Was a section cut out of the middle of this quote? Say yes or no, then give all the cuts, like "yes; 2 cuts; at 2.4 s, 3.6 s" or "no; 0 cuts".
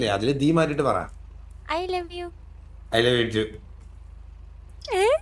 no; 0 cuts